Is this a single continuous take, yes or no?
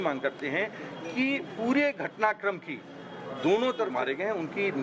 no